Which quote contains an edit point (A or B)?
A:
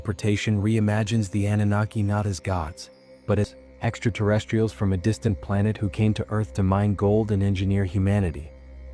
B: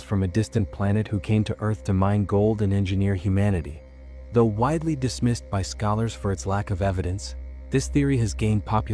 A